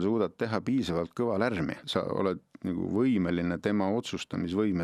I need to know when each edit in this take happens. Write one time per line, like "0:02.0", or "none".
0:01.8